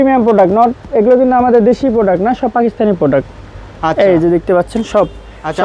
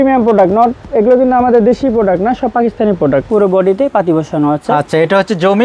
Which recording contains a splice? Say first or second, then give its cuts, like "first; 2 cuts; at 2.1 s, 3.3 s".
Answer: second; 1 cut; at 3.3 s